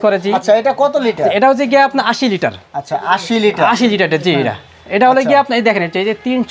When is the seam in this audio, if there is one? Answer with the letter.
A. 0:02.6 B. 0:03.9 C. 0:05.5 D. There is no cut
D